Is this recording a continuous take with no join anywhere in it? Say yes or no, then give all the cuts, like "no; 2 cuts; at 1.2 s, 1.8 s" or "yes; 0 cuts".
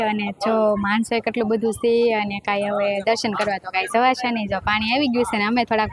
yes; 0 cuts